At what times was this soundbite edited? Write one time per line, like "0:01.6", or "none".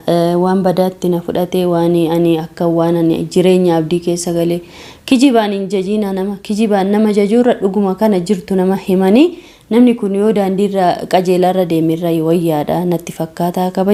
none